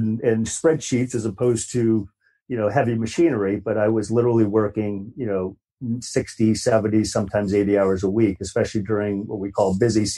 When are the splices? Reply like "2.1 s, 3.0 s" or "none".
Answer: 5.7 s

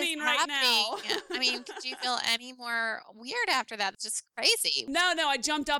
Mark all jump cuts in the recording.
4.8 s

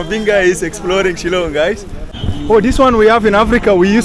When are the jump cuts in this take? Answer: 2.1 s

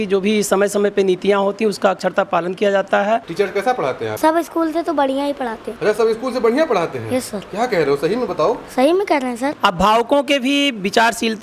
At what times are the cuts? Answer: 3.3 s, 4.1 s, 5.6 s, 9.5 s

